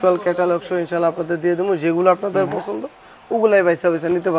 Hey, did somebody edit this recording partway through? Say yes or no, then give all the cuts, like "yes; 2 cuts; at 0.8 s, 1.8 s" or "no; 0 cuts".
no; 0 cuts